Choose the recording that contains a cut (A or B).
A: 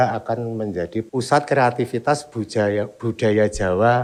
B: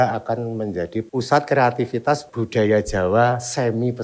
B